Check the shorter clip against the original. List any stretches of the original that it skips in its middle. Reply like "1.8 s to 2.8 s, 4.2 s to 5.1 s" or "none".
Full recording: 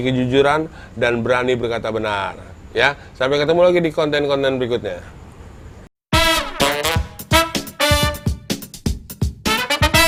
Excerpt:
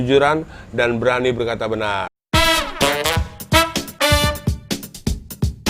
2.4 s to 5.9 s